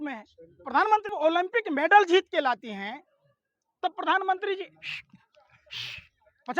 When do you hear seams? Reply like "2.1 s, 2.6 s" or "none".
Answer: 1.1 s

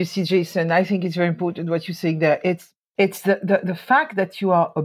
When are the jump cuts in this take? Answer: 2.8 s

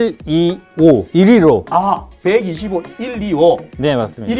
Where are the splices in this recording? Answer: 1.7 s

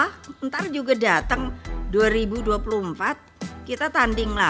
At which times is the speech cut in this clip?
none

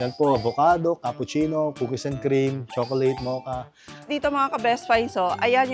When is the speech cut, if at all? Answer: 4.1 s

